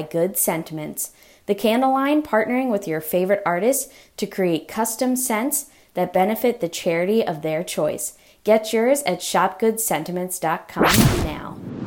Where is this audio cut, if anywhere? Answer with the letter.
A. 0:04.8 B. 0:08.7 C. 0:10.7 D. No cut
C